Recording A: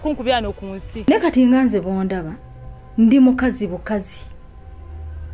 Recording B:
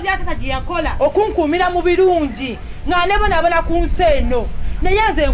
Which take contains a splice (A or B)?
A